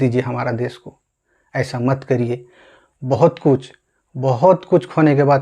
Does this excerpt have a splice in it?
no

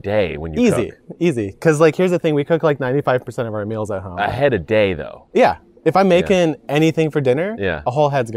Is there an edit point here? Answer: no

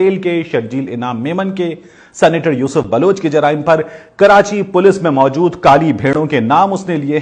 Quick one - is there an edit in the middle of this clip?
no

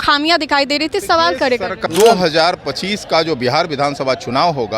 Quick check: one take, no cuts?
no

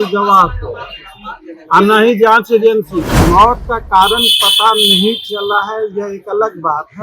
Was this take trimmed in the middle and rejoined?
yes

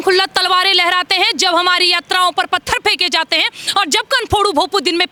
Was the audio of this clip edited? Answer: no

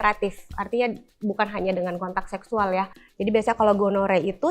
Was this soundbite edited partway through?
yes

